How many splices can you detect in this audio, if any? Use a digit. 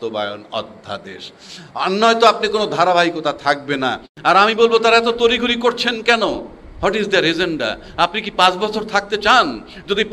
1